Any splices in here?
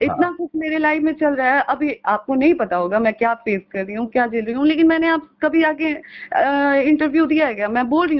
no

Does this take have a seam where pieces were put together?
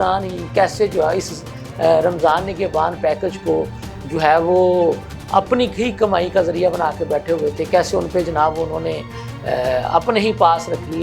no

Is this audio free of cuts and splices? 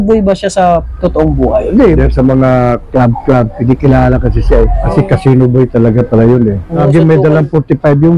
no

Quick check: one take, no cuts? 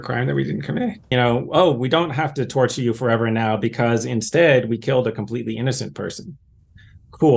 no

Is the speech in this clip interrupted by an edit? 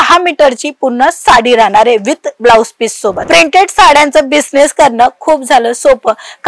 yes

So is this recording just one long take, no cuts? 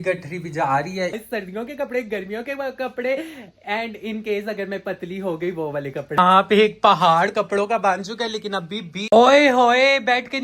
no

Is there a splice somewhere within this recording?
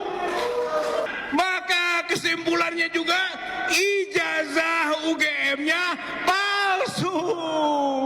yes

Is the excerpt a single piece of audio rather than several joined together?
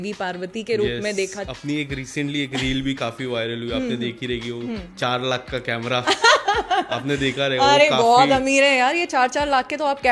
no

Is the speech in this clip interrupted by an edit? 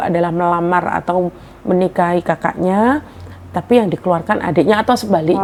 no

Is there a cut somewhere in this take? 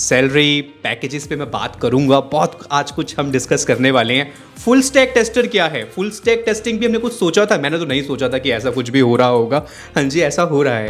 no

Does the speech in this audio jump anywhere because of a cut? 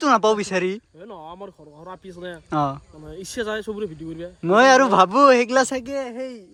no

